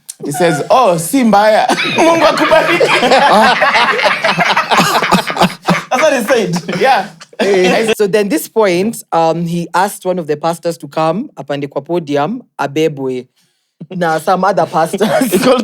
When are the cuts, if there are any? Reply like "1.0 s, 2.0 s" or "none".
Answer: 7.9 s

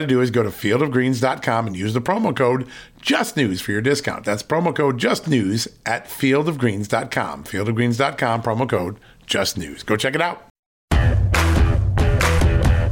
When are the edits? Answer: 10.7 s

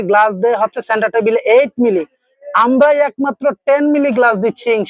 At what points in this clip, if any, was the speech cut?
none

